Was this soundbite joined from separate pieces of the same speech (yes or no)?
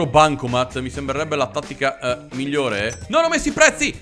yes